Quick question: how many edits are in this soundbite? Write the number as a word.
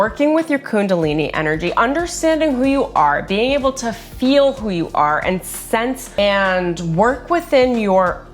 one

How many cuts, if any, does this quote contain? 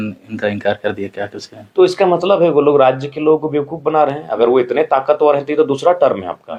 zero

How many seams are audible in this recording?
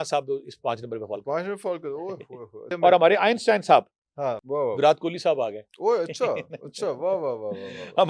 one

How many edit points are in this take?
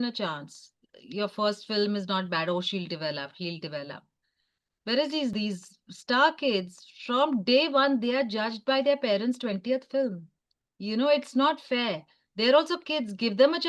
zero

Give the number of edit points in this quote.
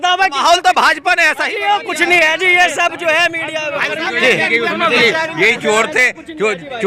zero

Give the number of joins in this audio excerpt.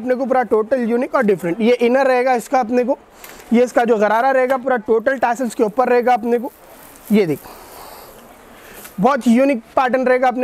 zero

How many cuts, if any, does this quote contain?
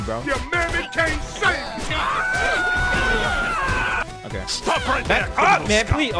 one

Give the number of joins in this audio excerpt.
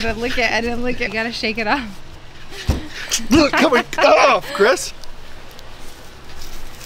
two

